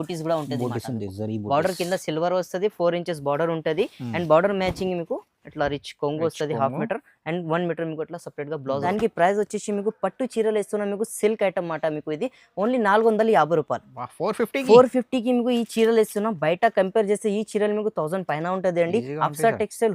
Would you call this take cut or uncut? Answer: cut